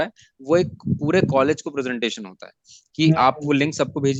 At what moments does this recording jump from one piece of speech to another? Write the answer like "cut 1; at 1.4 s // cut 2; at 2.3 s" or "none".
none